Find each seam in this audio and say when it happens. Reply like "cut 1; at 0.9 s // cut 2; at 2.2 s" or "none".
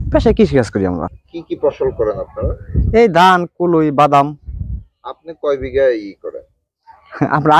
cut 1; at 1.2 s